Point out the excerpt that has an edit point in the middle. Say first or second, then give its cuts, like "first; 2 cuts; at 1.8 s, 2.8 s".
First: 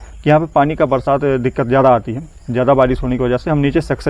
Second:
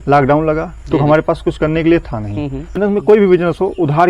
second; 1 cut; at 2.8 s